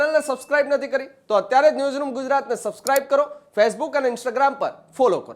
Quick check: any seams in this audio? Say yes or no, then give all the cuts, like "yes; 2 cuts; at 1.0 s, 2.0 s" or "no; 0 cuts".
no; 0 cuts